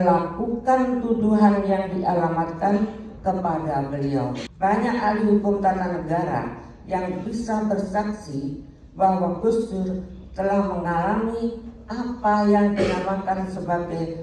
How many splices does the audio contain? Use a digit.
1